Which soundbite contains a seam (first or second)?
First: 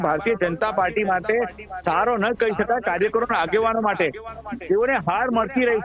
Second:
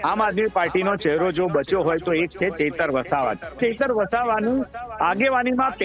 second